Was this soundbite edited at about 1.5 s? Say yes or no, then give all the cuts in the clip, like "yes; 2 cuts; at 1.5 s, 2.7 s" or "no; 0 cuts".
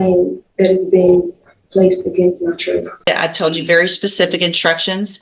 no; 1 cut; at 3.1 s